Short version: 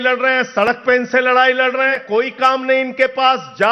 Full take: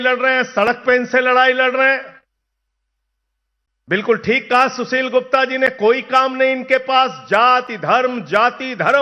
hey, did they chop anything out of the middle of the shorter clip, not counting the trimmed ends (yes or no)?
yes